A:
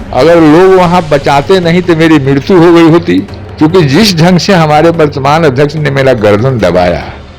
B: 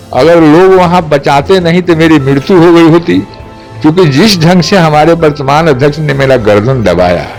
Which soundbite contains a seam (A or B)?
A